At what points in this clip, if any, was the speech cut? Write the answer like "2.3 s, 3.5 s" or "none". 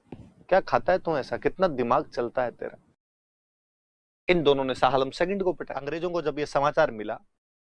5.9 s